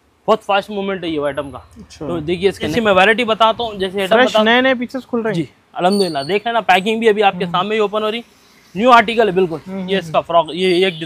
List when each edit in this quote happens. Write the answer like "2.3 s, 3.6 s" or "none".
2.7 s